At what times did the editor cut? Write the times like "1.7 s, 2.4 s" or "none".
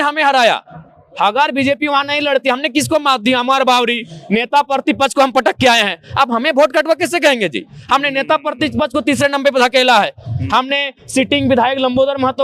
none

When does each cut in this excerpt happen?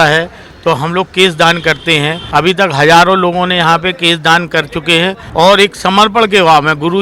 2.2 s, 5.2 s

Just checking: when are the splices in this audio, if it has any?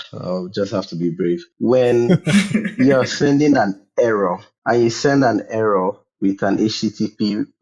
1.5 s, 4.5 s

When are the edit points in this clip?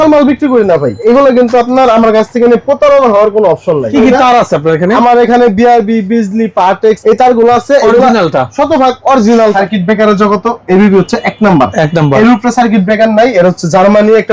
1.0 s, 3.9 s, 7.0 s, 9.5 s

